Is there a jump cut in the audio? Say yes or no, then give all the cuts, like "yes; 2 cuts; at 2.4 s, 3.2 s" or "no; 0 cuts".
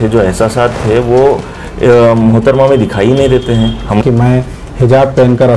yes; 1 cut; at 4.0 s